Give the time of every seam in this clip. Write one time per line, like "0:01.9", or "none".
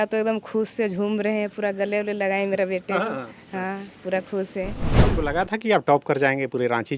0:04.8